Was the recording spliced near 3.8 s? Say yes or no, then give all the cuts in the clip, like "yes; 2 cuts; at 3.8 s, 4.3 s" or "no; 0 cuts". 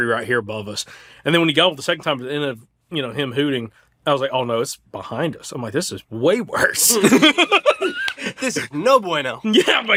no; 0 cuts